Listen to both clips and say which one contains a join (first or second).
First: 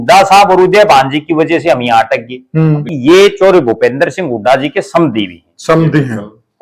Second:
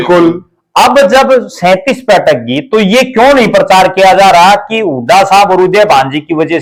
first